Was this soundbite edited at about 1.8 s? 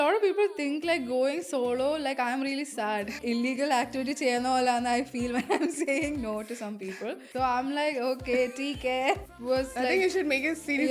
no; 3 cuts; at 3.2 s, 7.3 s, 9.3 s

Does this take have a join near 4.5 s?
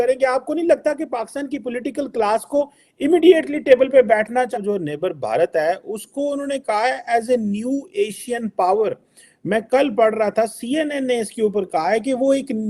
yes; 2 cuts; at 4.5 s, 8.8 s

